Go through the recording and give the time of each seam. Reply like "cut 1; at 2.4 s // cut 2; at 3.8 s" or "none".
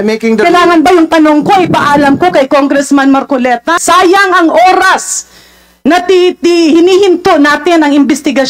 cut 1; at 3.8 s